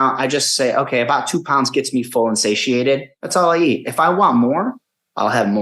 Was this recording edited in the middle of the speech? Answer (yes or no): yes